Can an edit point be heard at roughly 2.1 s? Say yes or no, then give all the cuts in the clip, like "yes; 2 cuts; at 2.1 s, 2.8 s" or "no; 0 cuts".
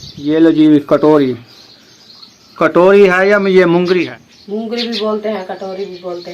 no; 1 cut; at 4.1 s